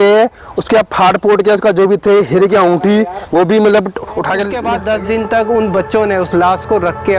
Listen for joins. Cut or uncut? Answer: cut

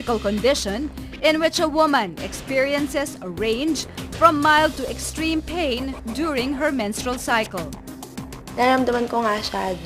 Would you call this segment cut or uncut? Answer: cut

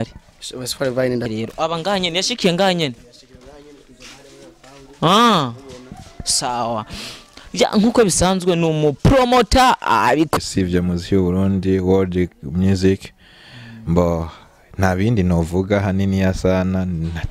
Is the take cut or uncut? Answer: cut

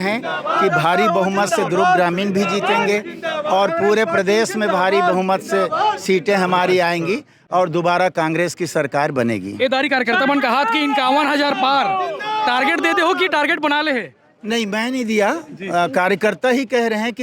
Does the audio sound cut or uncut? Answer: uncut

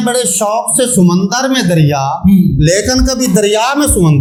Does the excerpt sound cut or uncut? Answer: uncut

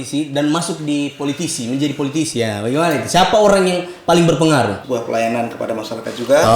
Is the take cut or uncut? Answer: cut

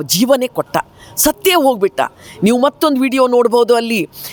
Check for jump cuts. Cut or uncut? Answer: uncut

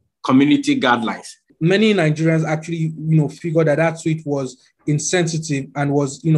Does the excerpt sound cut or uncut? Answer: cut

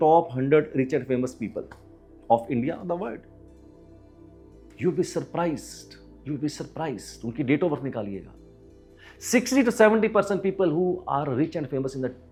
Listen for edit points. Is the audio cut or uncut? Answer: uncut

